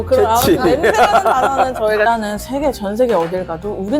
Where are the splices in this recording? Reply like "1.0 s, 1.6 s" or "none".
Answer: 2.0 s